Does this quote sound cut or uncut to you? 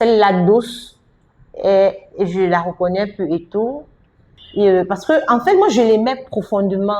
cut